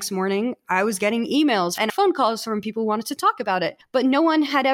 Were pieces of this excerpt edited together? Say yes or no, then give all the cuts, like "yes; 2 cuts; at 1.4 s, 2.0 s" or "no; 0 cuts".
yes; 2 cuts; at 1.8 s, 3.8 s